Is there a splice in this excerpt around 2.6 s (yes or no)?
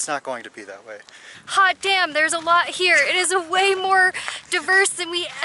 no